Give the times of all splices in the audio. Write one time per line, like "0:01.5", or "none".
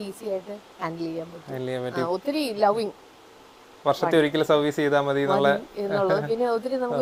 none